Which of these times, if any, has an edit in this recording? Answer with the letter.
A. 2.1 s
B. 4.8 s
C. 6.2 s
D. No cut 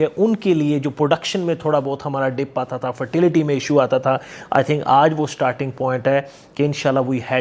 D